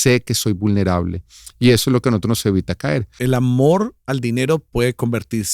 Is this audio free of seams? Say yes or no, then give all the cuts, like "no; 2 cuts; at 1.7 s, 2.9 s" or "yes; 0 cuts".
no; 1 cut; at 3.2 s